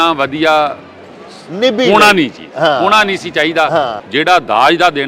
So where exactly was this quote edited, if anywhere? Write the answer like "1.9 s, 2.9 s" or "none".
4.0 s